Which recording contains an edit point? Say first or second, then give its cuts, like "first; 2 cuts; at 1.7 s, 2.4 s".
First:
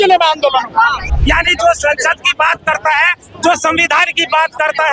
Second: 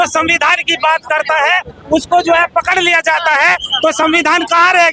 first; 1 cut; at 1.1 s